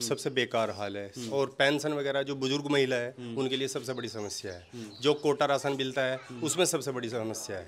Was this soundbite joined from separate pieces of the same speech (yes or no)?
no